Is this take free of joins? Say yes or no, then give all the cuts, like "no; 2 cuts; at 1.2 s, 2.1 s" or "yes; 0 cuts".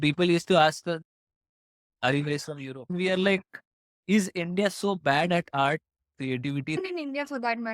no; 3 cuts; at 1.0 s, 2.9 s, 6.8 s